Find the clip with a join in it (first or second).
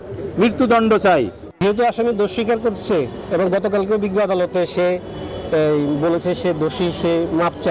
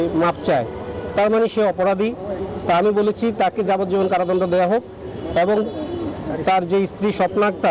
first